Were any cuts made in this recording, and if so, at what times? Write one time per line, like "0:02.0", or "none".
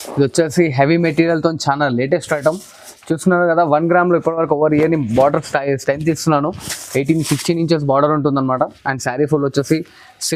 none